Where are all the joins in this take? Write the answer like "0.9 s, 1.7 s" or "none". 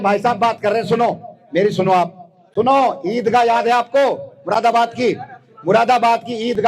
none